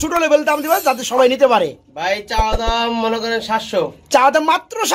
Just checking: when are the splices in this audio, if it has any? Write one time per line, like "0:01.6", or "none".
none